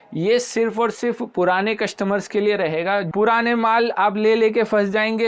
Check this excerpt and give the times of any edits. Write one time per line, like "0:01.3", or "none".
0:03.1